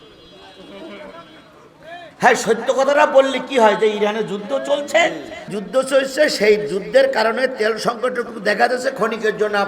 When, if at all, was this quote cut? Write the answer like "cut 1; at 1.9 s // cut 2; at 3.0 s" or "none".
cut 1; at 5.6 s

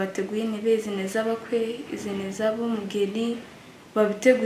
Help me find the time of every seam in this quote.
none

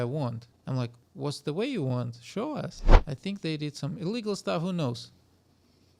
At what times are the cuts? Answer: cut 1; at 2.9 s

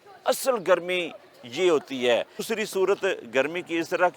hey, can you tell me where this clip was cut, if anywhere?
cut 1; at 2.4 s

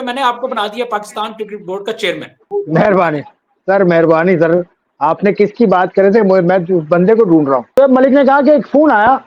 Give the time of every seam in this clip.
cut 1; at 2.4 s // cut 2; at 7.7 s

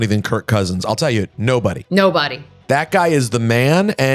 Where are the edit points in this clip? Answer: none

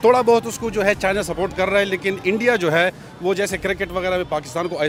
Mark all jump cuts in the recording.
none

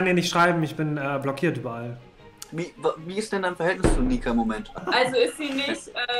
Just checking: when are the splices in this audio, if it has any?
cut 1; at 2.2 s // cut 2; at 4.7 s

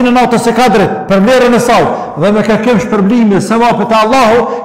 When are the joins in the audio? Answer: cut 1; at 1.0 s

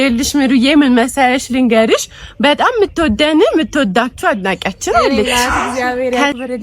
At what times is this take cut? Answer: cut 1; at 5.3 s

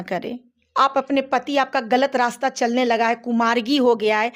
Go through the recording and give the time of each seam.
none

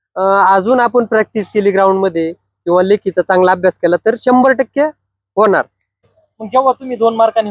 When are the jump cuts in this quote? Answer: cut 1; at 6.1 s

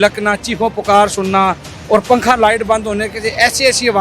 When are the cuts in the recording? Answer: none

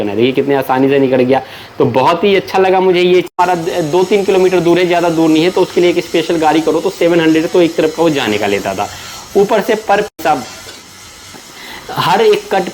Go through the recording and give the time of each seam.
cut 1; at 3.3 s // cut 2; at 10.2 s

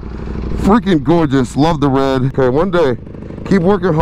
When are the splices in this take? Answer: cut 1; at 2.3 s

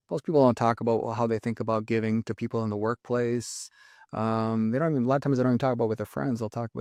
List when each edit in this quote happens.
none

